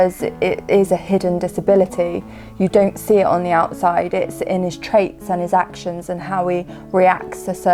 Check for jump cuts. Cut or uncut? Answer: uncut